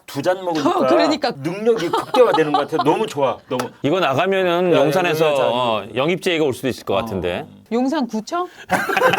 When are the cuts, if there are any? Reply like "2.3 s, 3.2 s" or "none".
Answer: 3.7 s, 7.5 s